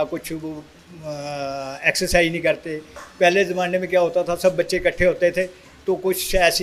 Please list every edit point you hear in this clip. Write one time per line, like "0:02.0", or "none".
none

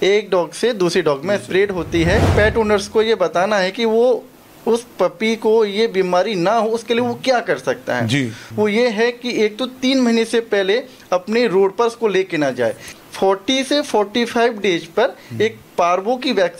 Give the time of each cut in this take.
0:02.3
0:08.4
0:12.9

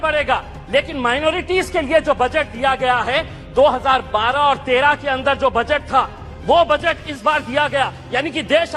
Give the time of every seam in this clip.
none

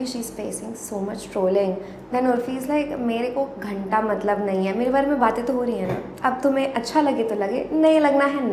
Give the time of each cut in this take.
none

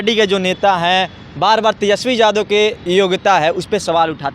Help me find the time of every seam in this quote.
0:02.8

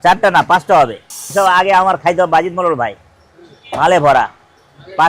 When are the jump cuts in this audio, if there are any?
0:01.3

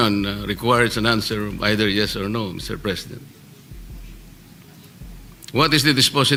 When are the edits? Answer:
none

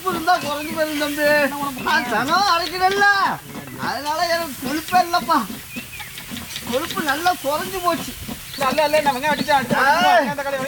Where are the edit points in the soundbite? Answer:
none

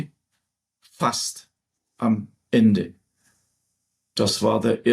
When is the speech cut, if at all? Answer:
none

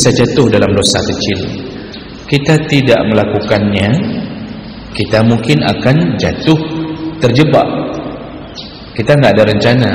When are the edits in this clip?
none

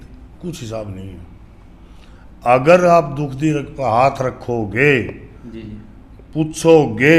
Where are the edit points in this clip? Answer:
none

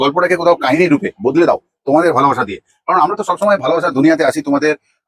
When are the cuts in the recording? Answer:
none

